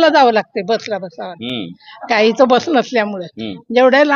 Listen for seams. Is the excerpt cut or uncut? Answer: uncut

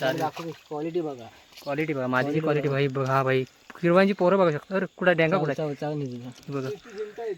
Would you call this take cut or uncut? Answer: uncut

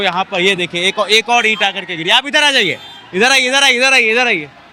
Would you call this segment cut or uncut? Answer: uncut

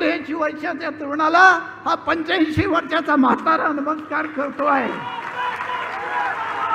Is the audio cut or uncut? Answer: uncut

